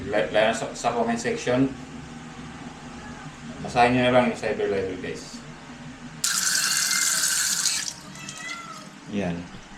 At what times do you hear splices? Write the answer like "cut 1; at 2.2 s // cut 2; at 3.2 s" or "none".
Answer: cut 1; at 6.3 s